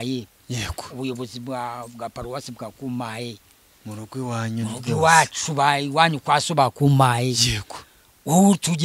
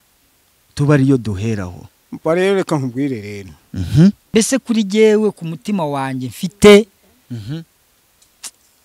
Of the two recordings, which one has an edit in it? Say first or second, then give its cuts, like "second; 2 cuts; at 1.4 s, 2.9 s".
second; 1 cut; at 4.3 s